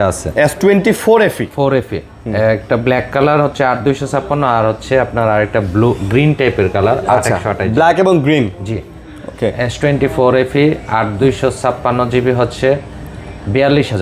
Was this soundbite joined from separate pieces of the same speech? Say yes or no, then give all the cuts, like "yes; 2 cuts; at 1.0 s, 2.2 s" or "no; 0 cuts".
no; 0 cuts